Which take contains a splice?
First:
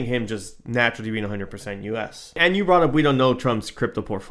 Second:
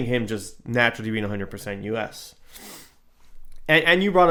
first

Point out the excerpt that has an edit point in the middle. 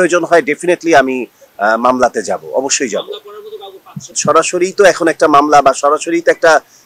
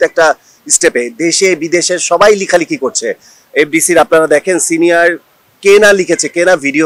first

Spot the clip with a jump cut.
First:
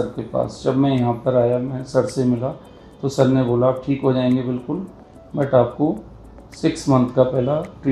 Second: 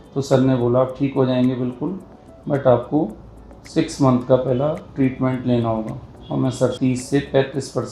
second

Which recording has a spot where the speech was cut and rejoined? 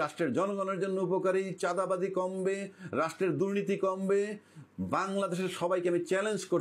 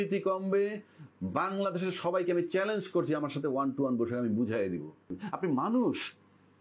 second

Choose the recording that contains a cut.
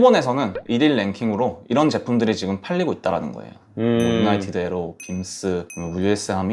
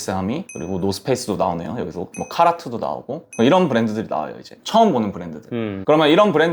second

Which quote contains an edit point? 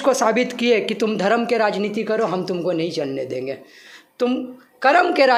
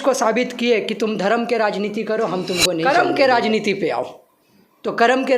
second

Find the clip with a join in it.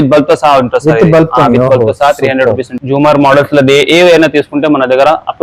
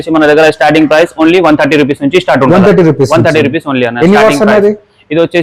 first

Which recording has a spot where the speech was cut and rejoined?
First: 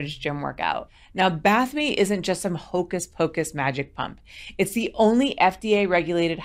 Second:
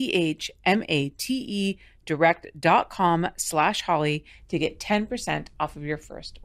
first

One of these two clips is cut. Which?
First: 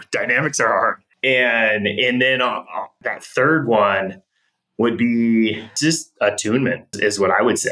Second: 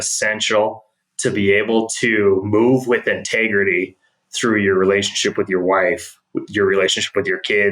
first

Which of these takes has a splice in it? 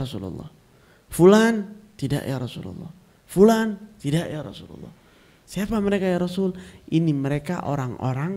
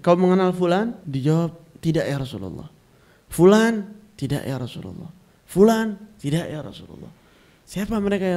second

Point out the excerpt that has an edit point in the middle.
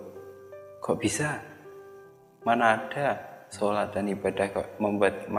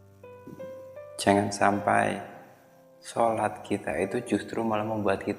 second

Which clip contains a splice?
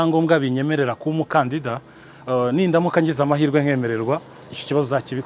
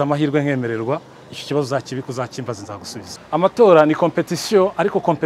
second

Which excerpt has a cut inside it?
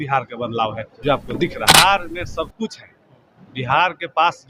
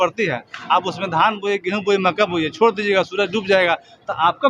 first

